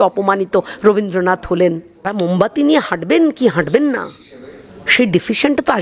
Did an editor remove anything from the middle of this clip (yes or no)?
yes